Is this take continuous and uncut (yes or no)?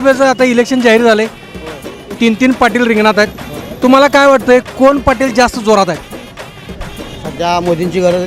yes